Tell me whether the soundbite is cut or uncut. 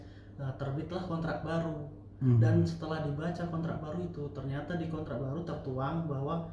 uncut